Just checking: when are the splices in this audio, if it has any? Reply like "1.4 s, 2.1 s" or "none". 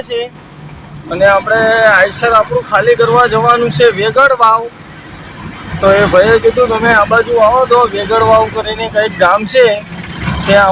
none